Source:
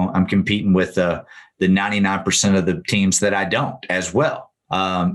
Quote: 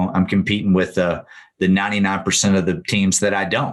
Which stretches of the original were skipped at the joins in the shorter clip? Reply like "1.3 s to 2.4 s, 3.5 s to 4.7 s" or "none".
none